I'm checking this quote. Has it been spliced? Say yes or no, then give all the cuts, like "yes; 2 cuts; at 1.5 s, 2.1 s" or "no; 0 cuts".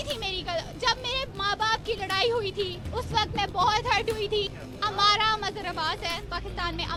no; 0 cuts